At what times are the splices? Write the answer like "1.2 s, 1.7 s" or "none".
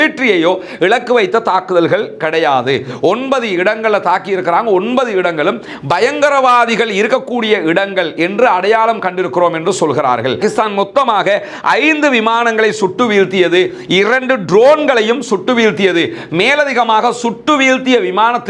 10.4 s